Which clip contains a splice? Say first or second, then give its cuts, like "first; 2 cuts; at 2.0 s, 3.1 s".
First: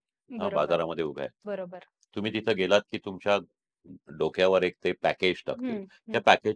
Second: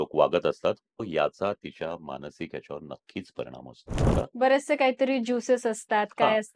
second; 2 cuts; at 1.1 s, 4.0 s